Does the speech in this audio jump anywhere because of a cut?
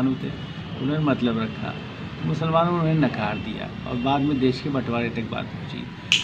no; 0 cuts

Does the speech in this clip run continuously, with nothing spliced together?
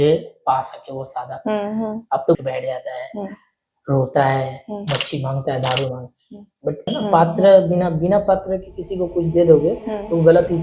no; 2 cuts; at 2.4 s, 6.9 s

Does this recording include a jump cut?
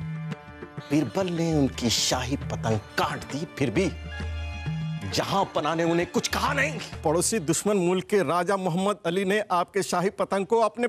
yes; 1 cut; at 7.0 s

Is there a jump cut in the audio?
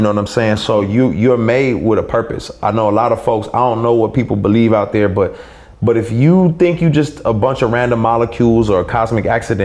no; 0 cuts

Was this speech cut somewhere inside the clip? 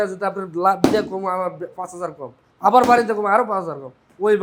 no; 0 cuts

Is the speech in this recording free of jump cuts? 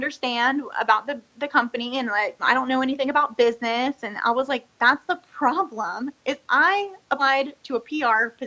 no; 1 cut; at 2.4 s

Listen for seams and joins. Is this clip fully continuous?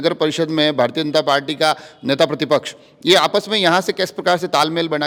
yes; 0 cuts

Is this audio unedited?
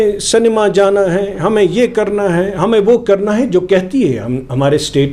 yes; 0 cuts

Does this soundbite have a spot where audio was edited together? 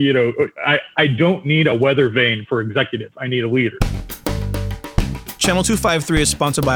yes; 1 cut; at 3.7 s

